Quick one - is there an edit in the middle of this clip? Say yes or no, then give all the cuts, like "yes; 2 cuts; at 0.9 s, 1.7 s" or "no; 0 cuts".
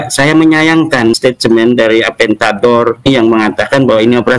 yes; 2 cuts; at 1.1 s, 3.1 s